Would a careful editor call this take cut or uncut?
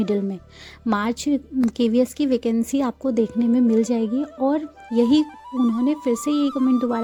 uncut